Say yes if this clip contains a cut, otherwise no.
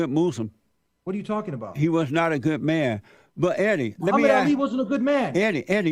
no